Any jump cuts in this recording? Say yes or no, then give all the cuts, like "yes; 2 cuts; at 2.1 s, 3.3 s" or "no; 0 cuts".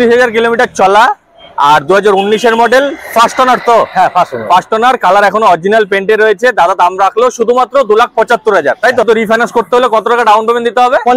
yes; 1 cut; at 9.0 s